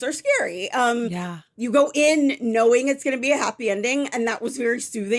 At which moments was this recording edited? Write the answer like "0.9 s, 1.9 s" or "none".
1.2 s